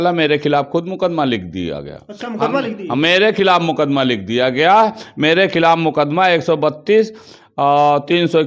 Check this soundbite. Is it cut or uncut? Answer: uncut